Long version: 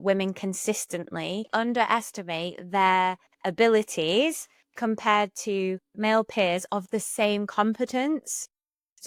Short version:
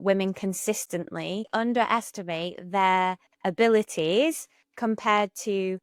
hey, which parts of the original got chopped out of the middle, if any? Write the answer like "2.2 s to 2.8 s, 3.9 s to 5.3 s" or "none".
none